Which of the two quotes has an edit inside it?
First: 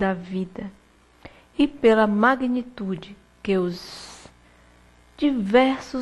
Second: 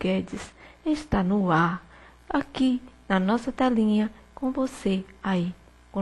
first; 1 cut; at 1.3 s

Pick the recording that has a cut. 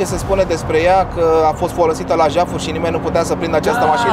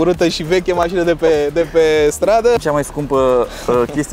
second; 1 cut; at 2.6 s

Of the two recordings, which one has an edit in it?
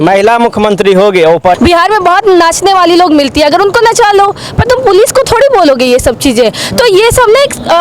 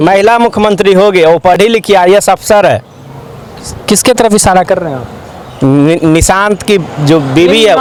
first; 1 cut; at 1.6 s

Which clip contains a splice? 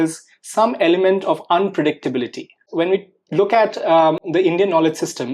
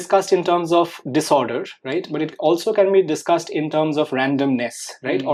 first; 1 cut; at 2.7 s

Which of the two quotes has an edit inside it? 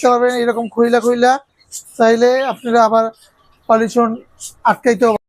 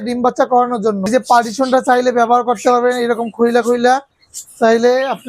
second; 1 cut; at 1.1 s

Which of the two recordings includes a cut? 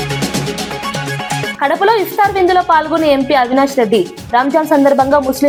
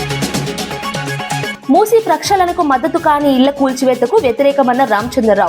second; 1 cut; at 1.5 s

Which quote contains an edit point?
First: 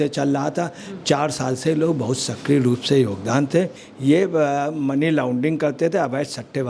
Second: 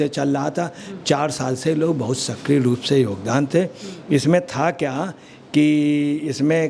first; 1 cut; at 3.8 s

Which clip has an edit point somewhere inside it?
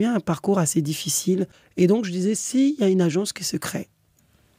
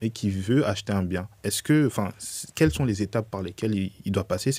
first; 1 cut; at 1.6 s

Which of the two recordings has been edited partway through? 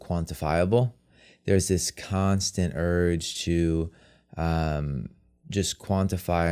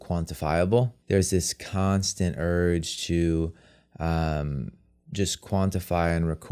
second; 1 cut; at 1.0 s

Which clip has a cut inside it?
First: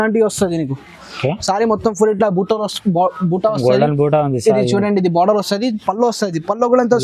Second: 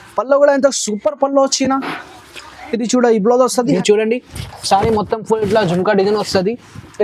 second; 1 cut; at 3.7 s

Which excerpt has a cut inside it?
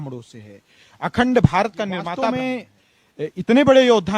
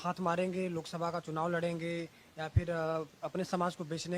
first; 1 cut; at 2.1 s

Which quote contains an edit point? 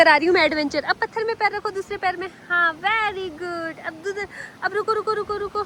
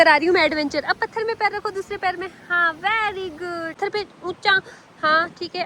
second; 1 cut; at 3.8 s

